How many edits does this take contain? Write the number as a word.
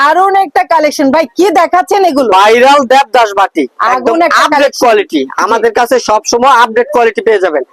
zero